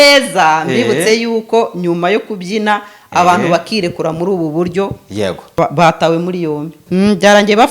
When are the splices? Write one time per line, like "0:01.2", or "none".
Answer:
0:05.6
0:06.8